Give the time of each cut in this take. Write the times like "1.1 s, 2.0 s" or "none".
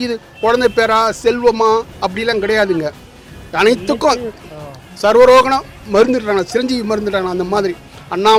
none